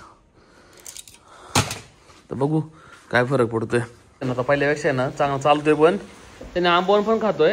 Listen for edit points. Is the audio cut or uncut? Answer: cut